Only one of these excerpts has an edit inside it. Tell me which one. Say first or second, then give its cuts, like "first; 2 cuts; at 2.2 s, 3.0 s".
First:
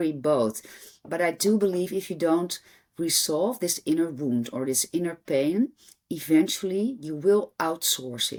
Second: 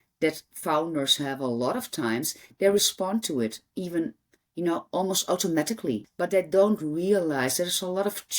second; 1 cut; at 6.0 s